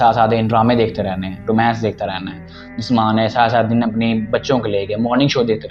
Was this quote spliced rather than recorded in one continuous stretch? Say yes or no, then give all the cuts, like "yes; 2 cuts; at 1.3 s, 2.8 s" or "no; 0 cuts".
no; 0 cuts